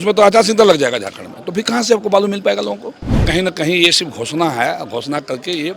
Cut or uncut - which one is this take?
cut